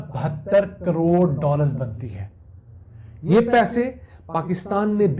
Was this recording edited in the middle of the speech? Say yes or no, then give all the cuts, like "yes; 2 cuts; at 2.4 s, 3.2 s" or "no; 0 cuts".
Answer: no; 0 cuts